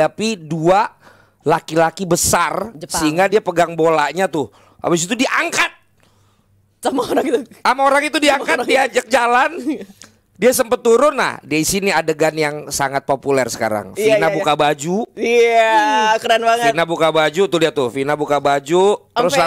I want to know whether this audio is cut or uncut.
uncut